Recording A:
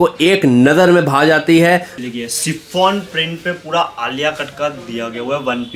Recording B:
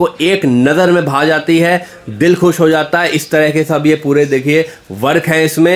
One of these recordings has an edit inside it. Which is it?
A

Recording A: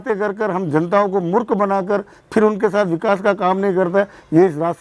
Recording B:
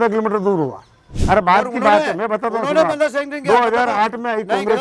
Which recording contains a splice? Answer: B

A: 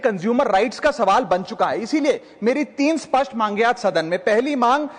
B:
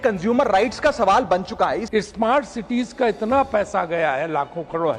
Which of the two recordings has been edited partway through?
B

